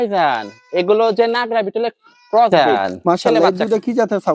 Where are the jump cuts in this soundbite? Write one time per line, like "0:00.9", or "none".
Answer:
0:02.5